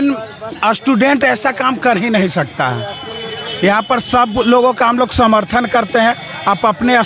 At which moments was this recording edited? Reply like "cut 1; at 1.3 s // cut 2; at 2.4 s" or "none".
none